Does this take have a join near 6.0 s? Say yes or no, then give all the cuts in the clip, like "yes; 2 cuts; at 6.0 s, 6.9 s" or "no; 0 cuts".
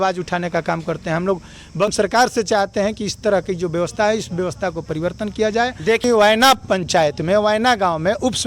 yes; 2 cuts; at 1.9 s, 6.0 s